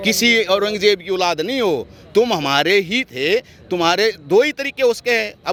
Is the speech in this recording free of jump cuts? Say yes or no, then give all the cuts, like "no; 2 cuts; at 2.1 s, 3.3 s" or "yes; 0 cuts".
yes; 0 cuts